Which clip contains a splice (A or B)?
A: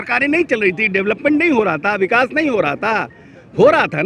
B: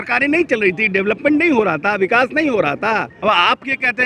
B